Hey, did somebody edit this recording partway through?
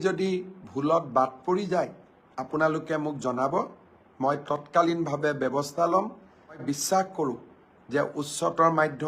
yes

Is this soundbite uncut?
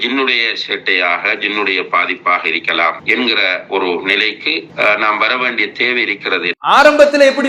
yes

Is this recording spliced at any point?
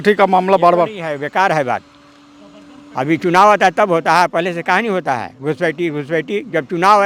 no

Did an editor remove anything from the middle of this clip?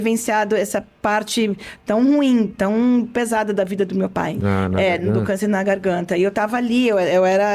yes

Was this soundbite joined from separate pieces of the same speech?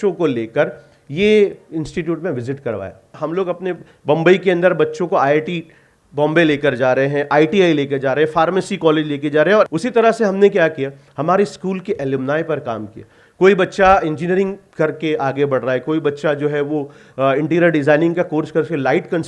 yes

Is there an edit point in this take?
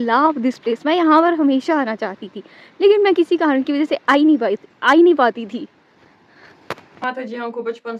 yes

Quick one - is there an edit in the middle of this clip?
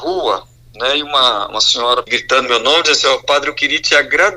yes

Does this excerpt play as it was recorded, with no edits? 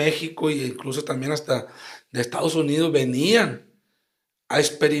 yes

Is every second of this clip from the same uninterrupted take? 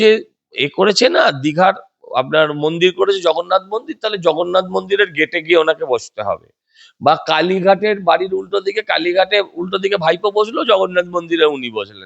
yes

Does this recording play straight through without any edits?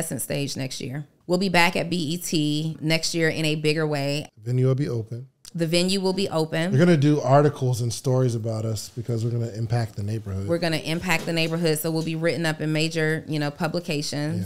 no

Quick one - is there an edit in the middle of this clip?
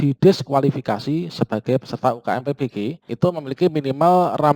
yes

